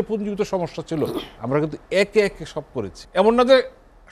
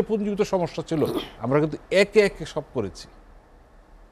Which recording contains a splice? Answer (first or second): first